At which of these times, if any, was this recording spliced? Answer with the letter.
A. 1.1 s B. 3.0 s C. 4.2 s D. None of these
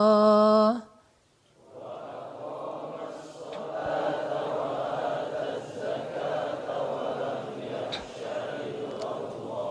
D